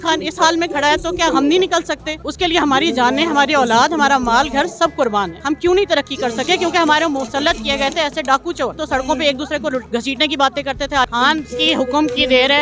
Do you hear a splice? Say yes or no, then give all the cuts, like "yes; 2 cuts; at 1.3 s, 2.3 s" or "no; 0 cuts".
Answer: yes; 3 cuts; at 5.3 s, 8.7 s, 11.1 s